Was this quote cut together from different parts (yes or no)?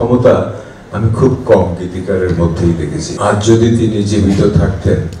no